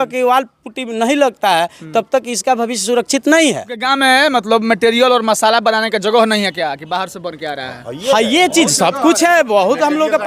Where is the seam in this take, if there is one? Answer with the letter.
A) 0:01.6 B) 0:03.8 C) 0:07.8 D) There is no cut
B